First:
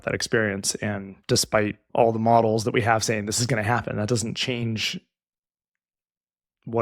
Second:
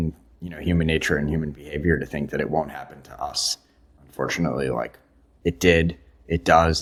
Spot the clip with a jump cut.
first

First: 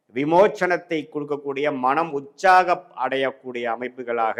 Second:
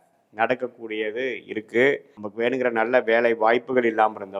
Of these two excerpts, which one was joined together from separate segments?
second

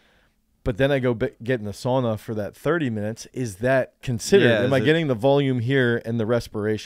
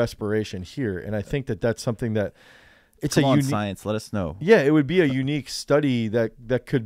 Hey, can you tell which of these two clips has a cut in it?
first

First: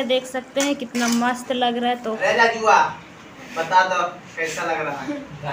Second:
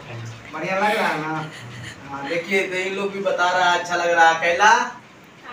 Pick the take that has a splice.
first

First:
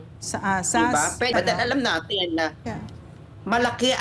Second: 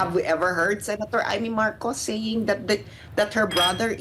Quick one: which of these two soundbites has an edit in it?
first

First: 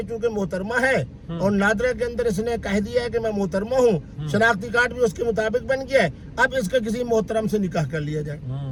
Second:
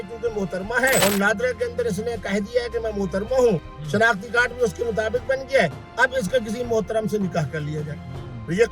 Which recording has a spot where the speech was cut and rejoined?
second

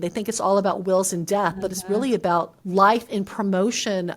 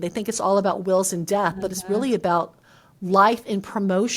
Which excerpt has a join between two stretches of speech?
first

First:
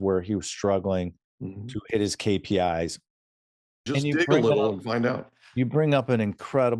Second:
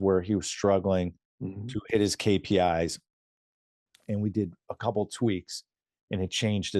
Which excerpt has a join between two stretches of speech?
first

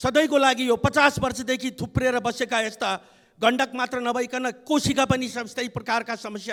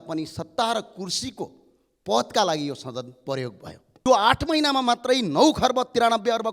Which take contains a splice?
second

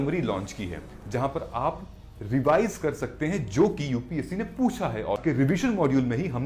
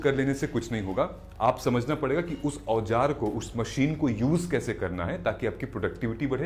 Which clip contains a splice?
first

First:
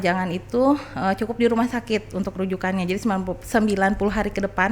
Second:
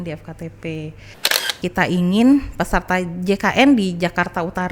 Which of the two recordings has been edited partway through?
second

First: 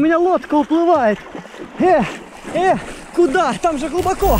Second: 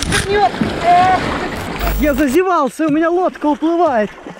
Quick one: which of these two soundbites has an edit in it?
second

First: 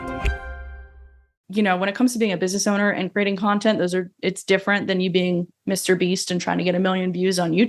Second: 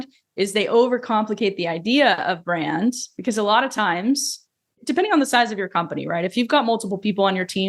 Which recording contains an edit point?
first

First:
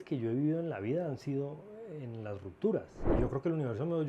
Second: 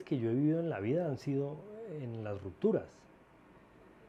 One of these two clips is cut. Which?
first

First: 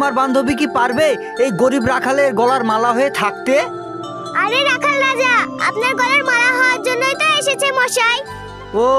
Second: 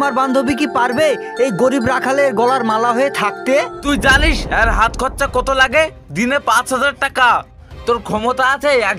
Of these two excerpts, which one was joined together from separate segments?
second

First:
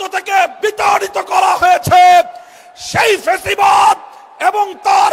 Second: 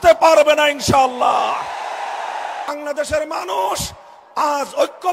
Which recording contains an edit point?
second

